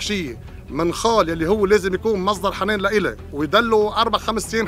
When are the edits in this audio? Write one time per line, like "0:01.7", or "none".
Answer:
0:03.2